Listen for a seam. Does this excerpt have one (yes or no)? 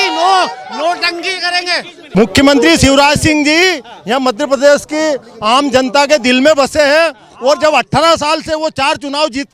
yes